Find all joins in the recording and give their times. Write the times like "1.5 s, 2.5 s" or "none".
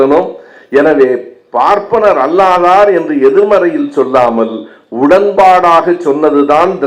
none